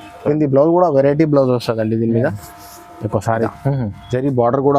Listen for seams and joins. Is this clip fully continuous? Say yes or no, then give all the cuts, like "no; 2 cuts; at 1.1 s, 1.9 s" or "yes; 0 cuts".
no; 1 cut; at 3.5 s